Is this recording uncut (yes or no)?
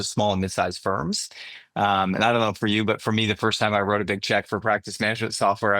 yes